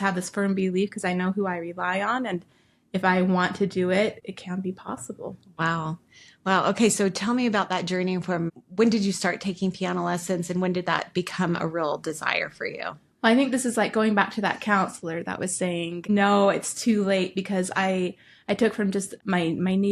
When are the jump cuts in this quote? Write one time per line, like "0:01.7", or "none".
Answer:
none